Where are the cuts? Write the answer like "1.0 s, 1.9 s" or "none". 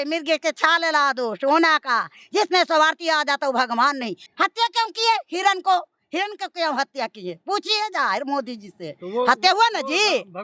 4.2 s